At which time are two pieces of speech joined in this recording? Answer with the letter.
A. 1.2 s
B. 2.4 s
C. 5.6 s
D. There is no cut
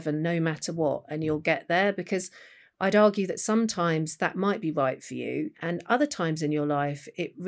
C